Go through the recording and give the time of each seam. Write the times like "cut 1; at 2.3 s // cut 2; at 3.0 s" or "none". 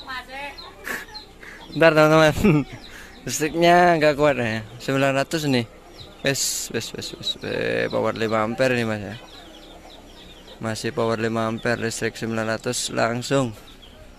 none